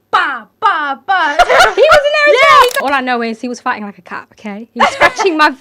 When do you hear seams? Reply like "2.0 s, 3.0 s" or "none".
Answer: 2.8 s